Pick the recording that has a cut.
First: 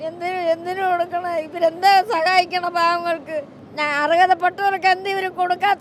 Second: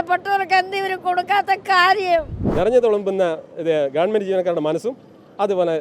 second; 1 cut; at 2.4 s

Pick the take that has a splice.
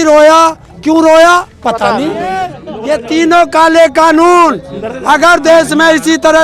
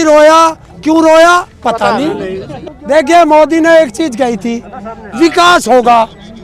first; 1 cut; at 2.7 s

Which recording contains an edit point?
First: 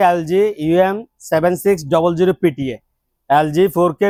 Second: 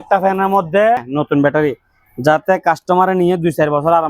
second; 1 cut; at 1.1 s

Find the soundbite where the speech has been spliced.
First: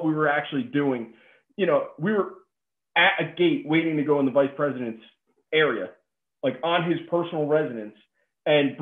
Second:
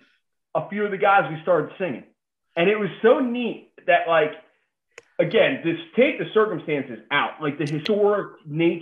second; 1 cut; at 7.9 s

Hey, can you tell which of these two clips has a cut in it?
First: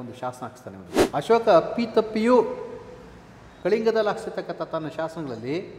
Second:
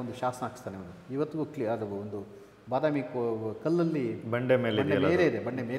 first; 1 cut; at 1.0 s

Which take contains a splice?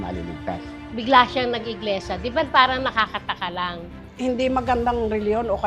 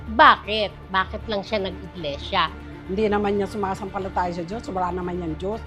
first; 1 cut; at 3.8 s

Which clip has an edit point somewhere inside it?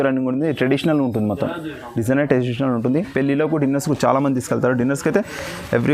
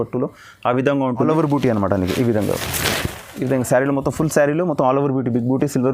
second; 1 cut; at 1.3 s

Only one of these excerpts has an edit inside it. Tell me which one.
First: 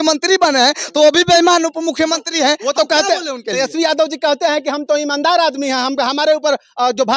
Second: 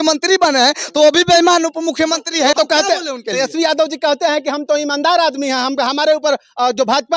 second; 1 cut; at 2.5 s

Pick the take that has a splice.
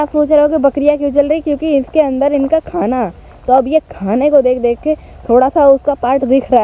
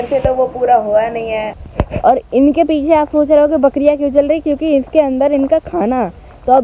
second; 1 cut; at 1.6 s

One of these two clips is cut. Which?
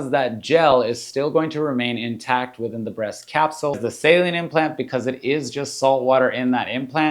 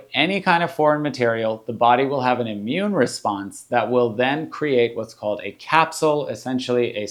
first; 1 cut; at 3.8 s

